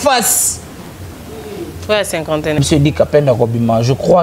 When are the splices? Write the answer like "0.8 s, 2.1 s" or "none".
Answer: 2.6 s

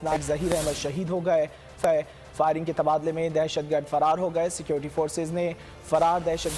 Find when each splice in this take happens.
none

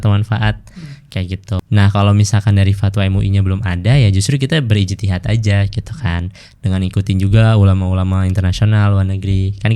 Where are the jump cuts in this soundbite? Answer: 1.5 s

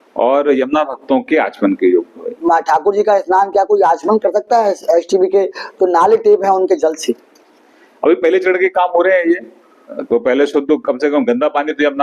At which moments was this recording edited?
2.5 s

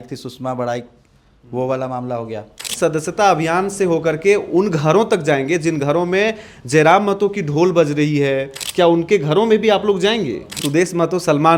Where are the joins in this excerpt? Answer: 2.7 s, 8.6 s, 10.6 s

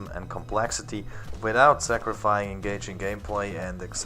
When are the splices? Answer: 1.2 s

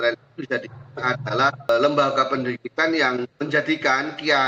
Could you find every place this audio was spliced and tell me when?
1.7 s, 3.4 s

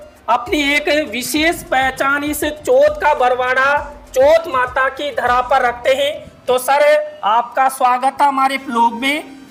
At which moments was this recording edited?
none

